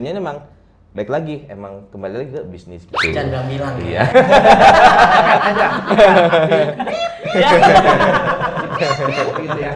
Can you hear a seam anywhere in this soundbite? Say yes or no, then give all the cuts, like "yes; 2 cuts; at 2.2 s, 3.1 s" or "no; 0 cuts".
no; 0 cuts